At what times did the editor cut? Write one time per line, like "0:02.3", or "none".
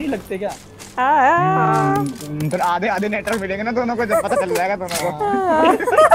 none